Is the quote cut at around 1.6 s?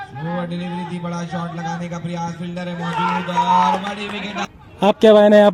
no; 1 cut; at 4.5 s

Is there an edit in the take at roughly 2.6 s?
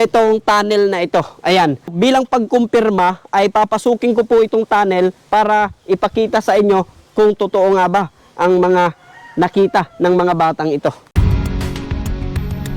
no; 1 cut; at 11.1 s

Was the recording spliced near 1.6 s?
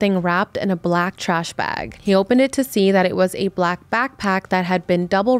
no; 0 cuts

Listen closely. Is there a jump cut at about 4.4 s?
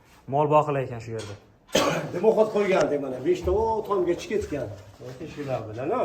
no; 1 cut; at 1.6 s

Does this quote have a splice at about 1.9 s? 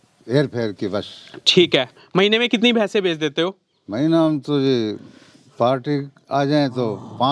no; 0 cuts

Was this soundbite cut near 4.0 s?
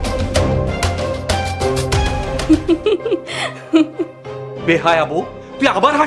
no; 1 cut; at 2.4 s

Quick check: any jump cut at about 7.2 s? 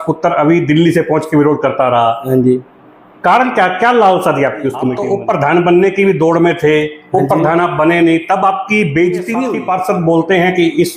no; 2 cuts; at 4.9 s, 9.5 s

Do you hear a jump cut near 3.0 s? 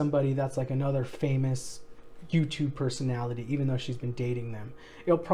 no; 0 cuts

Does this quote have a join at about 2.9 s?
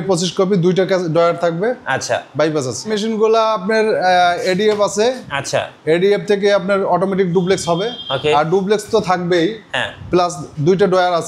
yes; 1 cut; at 2.9 s

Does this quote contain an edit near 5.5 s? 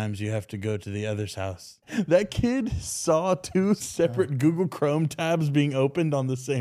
no; 2 cuts; at 1.8 s, 3.9 s

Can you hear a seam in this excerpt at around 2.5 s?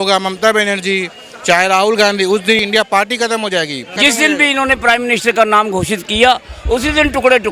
no; 0 cuts

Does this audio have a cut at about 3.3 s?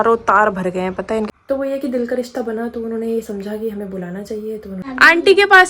no; 2 cuts; at 1.3 s, 4.8 s

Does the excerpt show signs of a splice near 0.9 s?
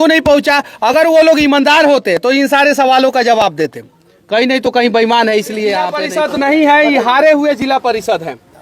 no; 1 cut; at 6.0 s

